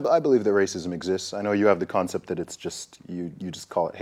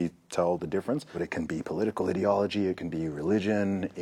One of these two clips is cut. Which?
second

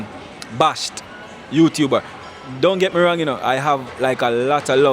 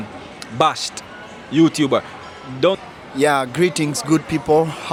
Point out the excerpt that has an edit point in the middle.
first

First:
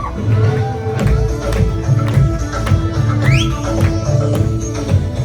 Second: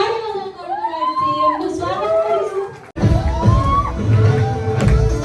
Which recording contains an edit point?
second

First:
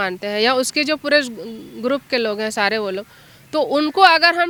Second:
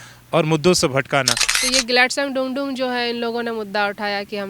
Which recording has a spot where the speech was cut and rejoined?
second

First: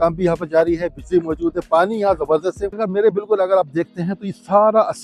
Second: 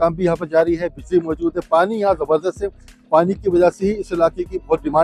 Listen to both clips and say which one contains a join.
first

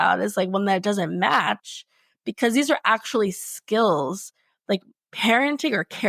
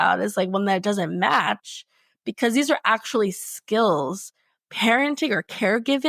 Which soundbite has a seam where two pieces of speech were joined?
second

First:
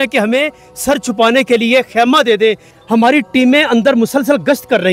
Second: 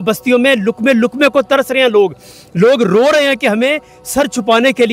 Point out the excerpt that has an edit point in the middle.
first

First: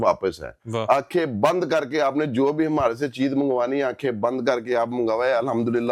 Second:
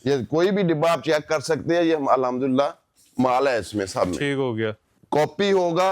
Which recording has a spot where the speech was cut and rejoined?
second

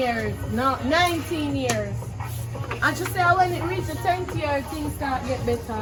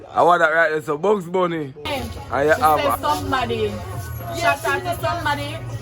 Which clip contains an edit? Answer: second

